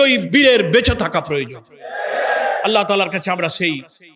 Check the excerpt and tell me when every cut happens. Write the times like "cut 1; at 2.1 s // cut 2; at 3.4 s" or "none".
none